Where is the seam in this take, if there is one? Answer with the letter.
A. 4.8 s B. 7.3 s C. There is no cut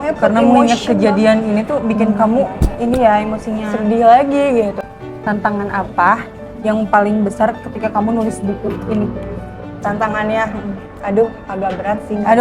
A